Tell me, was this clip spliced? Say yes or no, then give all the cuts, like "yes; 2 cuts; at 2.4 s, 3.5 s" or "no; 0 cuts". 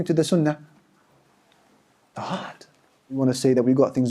yes; 1 cut; at 3.2 s